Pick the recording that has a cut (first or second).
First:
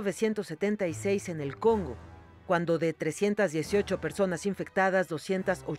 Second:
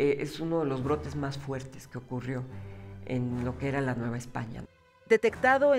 second